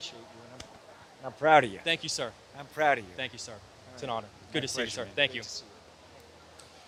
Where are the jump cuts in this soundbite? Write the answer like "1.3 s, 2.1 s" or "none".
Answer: none